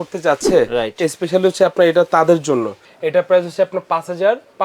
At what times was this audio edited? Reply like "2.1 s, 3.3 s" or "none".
2.8 s